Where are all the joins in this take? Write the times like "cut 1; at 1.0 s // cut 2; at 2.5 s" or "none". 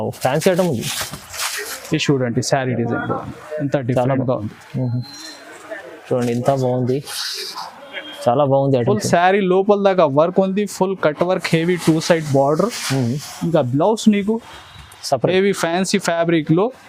none